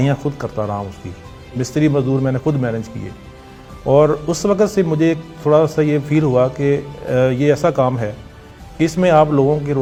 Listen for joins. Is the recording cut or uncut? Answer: uncut